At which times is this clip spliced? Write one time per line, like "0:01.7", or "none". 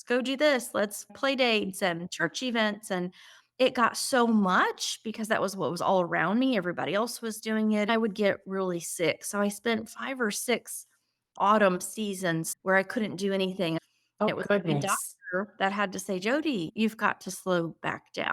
0:07.9
0:12.5
0:14.3